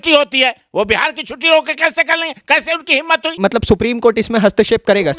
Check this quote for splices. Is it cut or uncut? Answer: cut